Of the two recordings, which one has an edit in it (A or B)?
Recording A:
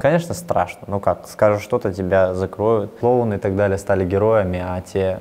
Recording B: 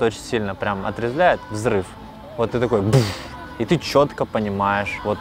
A